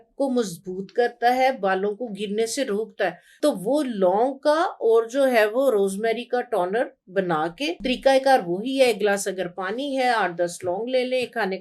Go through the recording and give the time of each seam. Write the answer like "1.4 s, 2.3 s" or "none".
3.2 s, 7.8 s